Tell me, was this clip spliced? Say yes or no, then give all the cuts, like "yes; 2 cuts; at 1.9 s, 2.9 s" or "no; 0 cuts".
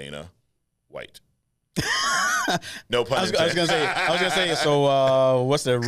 no; 0 cuts